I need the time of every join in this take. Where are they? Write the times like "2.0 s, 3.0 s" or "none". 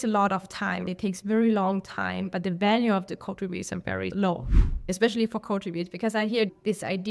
0.8 s, 4.8 s